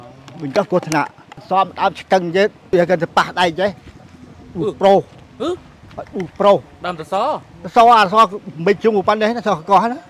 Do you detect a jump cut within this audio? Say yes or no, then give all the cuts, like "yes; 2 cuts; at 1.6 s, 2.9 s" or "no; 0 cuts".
yes; 2 cuts; at 1.4 s, 2.7 s